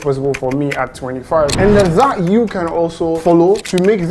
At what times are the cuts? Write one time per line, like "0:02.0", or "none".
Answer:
0:03.2